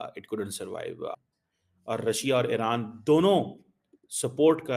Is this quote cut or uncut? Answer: cut